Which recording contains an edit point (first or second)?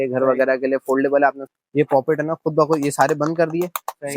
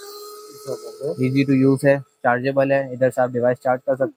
first